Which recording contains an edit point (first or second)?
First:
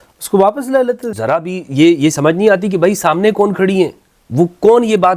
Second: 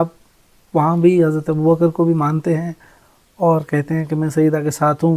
first